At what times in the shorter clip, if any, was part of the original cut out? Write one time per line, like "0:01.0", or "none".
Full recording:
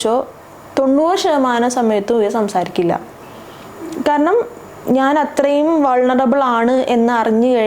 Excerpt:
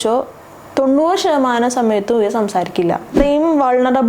0:03.2